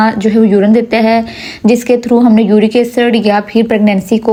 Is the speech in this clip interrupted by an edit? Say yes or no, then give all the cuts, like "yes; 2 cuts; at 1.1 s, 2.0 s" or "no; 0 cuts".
no; 0 cuts